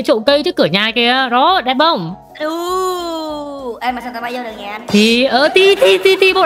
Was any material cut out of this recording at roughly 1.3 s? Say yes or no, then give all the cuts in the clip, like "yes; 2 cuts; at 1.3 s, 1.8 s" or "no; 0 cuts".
no; 0 cuts